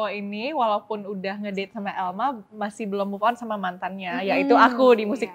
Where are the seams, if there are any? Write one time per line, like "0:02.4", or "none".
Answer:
none